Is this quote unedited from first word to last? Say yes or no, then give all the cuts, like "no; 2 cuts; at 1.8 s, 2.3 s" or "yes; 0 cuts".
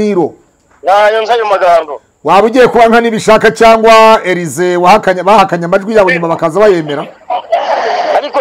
yes; 0 cuts